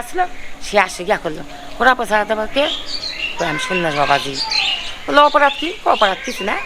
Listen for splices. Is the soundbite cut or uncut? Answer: uncut